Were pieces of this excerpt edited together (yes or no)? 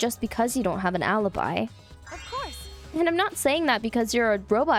no